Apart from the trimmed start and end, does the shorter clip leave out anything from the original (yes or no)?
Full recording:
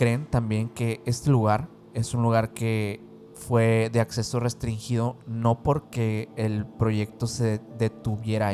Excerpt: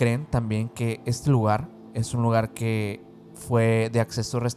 no